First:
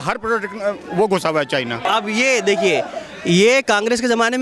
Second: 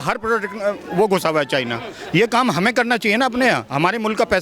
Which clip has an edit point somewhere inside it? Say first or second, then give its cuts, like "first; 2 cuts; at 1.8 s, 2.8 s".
first; 1 cut; at 1.9 s